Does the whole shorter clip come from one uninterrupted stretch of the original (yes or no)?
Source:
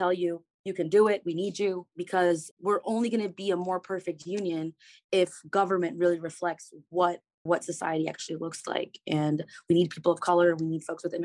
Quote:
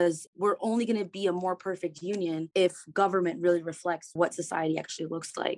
no